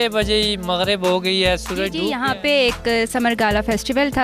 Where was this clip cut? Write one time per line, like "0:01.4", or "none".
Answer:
0:01.9